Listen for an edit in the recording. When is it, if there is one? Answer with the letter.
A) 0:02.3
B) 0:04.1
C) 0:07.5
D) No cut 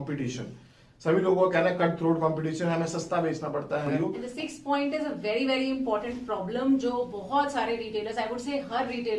B